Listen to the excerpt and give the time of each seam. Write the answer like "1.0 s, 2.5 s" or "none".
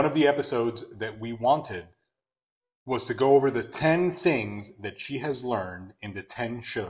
none